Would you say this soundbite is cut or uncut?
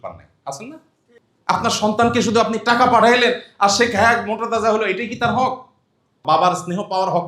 uncut